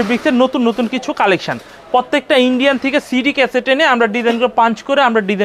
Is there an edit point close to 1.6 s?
no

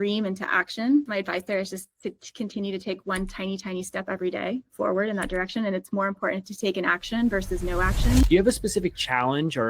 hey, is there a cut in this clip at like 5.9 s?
no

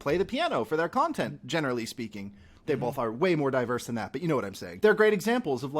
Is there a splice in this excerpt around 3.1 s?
no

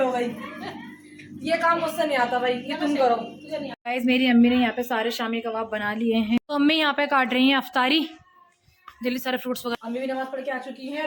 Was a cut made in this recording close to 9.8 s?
yes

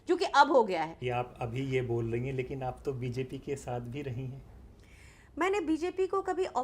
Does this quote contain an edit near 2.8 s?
no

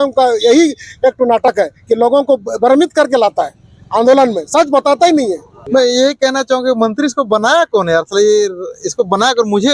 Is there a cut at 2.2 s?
no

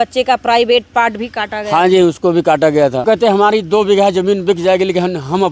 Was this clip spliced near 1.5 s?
no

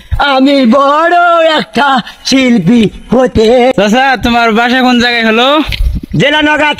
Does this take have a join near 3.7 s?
yes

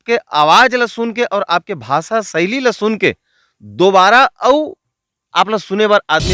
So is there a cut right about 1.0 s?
no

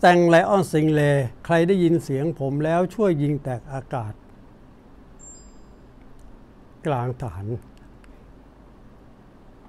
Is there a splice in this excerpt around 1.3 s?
yes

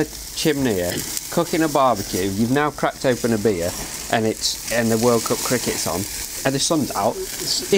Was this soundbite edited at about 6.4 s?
yes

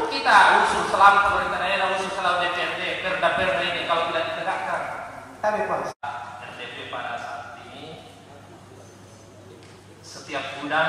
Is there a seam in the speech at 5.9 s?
yes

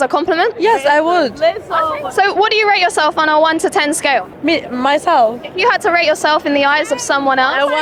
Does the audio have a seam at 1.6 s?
no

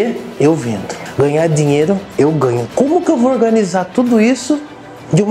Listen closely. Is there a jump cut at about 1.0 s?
yes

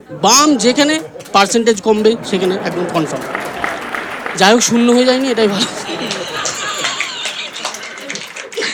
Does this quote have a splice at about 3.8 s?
no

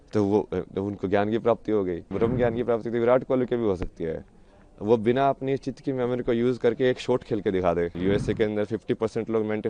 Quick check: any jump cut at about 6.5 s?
no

